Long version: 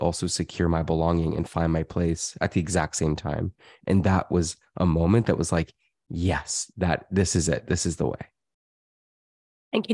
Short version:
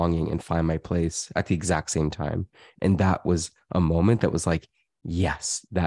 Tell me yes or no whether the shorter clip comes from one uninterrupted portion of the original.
yes